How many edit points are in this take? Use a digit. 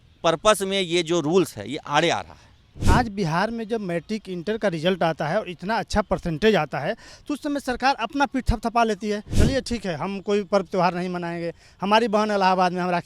2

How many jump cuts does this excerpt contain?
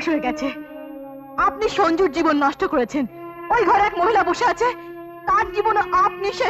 0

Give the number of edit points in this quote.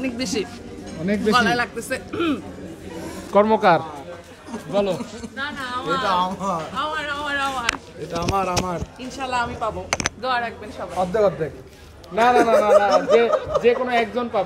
1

